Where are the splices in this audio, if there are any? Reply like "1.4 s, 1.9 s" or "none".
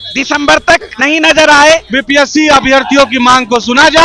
1.9 s

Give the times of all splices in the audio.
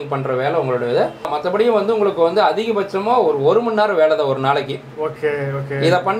1.3 s

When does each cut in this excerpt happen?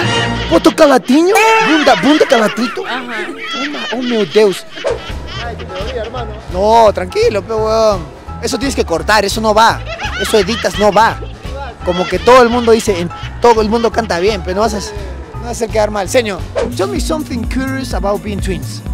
5.2 s, 16.6 s

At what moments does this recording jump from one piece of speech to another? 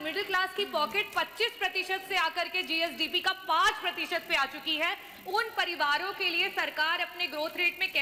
none

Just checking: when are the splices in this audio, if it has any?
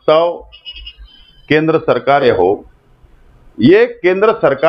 2.2 s

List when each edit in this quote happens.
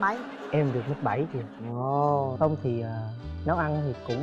2.3 s

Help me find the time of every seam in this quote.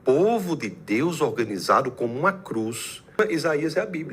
3.2 s

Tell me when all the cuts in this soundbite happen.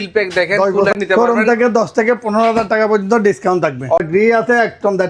0.9 s, 4.0 s

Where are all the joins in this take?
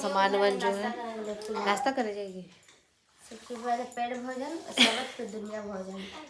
none

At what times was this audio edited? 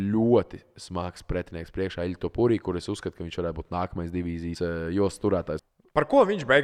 4.6 s, 5.5 s

